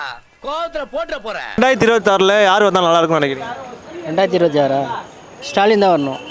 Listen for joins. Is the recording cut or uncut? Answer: cut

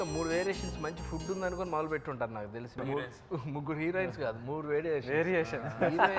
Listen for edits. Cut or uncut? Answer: cut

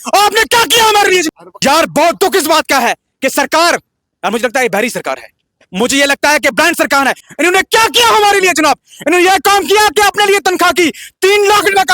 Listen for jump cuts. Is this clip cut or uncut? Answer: cut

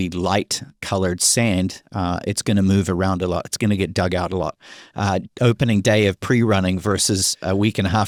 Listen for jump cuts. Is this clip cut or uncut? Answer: uncut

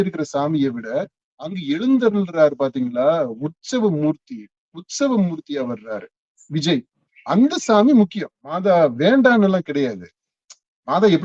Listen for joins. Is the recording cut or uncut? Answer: cut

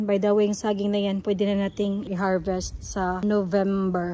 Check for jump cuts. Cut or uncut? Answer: cut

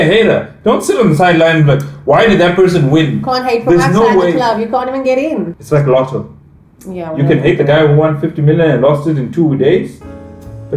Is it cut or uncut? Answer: cut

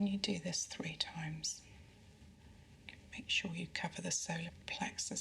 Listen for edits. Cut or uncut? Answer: cut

